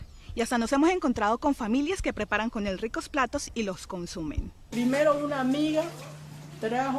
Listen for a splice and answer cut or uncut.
uncut